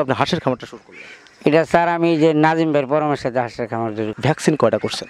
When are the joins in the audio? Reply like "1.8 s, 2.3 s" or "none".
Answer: 4.1 s